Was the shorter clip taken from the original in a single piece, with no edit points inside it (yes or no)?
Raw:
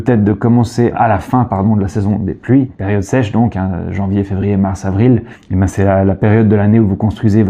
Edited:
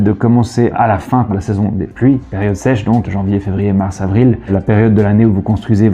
no